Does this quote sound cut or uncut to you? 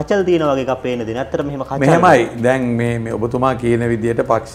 uncut